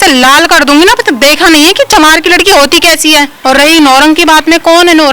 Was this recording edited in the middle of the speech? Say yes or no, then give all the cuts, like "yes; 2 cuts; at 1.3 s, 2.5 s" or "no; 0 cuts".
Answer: yes; 1 cut; at 3.3 s